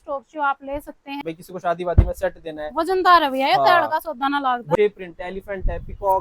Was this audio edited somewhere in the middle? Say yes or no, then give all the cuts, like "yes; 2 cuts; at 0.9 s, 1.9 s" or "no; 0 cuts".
yes; 2 cuts; at 1.2 s, 4.8 s